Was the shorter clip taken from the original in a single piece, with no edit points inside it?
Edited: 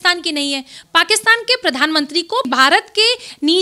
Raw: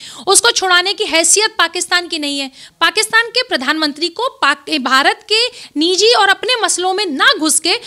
no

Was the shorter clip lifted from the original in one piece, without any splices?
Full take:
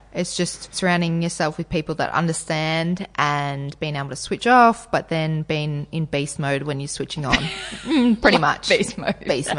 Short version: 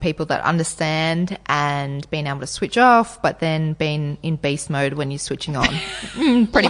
yes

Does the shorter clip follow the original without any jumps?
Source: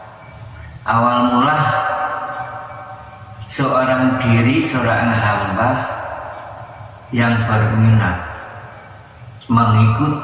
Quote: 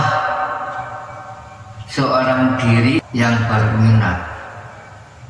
no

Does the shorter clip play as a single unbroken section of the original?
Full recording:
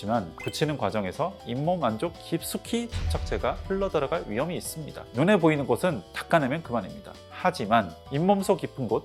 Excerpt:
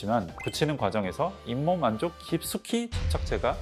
yes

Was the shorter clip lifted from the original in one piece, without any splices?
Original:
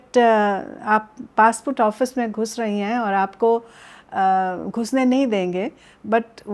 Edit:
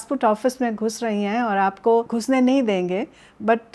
no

